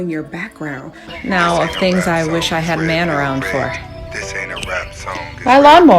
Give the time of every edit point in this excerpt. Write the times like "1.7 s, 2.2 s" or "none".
1.1 s